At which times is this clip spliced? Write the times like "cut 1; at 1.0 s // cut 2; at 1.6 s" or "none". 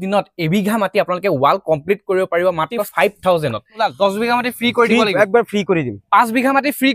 cut 1; at 2.9 s // cut 2; at 3.8 s